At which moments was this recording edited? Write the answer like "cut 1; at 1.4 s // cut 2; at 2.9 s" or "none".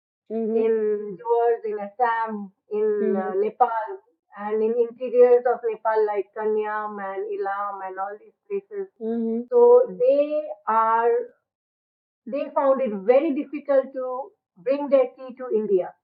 none